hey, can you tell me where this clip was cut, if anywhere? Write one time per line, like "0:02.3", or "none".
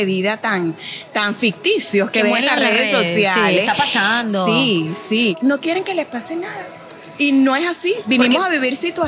0:05.4